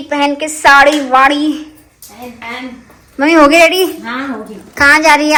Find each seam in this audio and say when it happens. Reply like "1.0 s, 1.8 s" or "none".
none